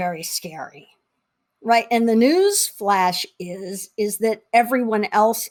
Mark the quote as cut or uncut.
uncut